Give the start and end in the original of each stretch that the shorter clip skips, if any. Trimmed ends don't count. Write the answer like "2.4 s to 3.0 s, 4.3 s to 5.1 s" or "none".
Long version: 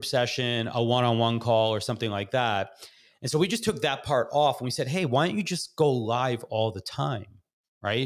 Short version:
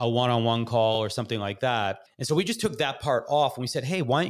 2.3 s to 2.6 s